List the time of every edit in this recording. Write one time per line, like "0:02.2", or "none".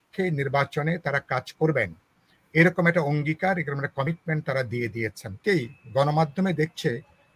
0:05.4